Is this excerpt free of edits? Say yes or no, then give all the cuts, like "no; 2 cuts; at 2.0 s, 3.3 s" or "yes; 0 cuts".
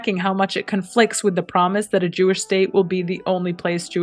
yes; 0 cuts